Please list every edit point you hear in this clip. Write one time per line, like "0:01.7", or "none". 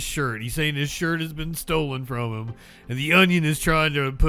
none

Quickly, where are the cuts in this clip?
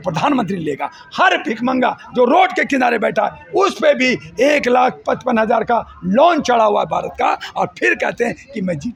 none

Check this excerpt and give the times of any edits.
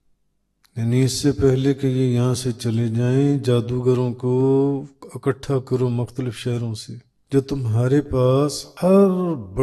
0:07.1
0:08.6

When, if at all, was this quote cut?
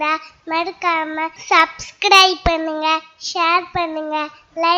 0:01.4

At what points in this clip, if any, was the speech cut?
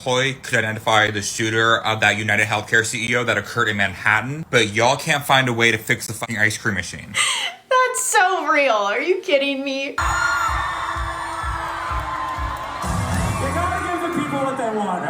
none

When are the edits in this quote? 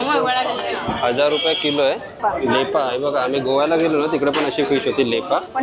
0:02.2

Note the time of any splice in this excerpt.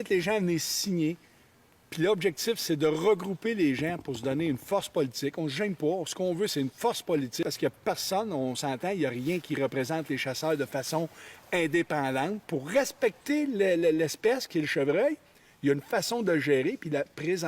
0:07.4
0:12.4

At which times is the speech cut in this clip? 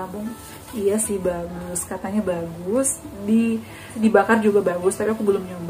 0:03.9

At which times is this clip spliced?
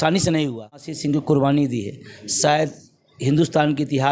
0:00.9

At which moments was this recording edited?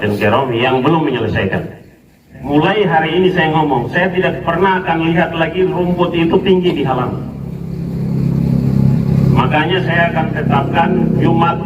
0:02.3

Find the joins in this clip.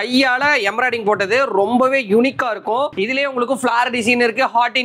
0:02.9

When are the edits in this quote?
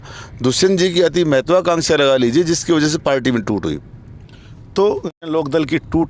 none

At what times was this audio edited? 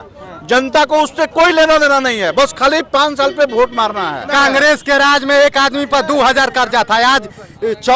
0:04.3

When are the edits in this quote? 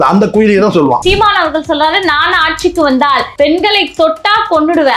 0:01.0
0:03.3

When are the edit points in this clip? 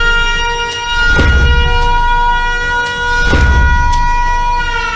none

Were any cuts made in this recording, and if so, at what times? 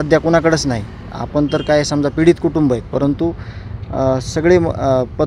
none

